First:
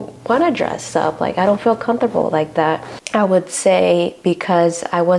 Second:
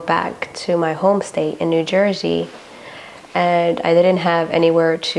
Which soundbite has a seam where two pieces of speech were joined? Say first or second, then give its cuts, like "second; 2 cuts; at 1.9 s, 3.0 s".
first; 1 cut; at 2.9 s